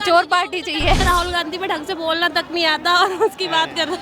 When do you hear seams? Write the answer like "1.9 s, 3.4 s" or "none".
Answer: 1.0 s